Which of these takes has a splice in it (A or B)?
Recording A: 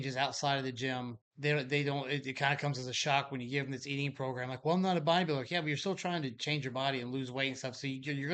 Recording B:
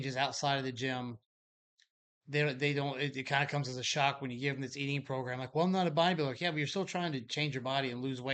A